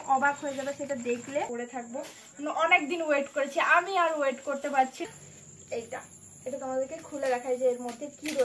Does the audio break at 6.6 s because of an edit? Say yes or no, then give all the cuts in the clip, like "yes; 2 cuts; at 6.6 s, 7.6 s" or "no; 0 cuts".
no; 2 cuts; at 1.5 s, 5.0 s